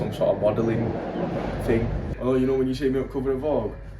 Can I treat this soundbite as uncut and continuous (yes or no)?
no